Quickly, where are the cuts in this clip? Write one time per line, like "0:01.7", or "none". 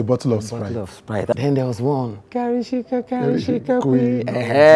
0:01.3